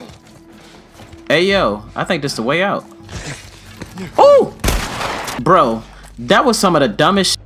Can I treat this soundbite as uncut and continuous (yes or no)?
no